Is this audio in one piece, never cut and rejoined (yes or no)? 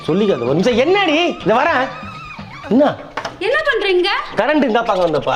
yes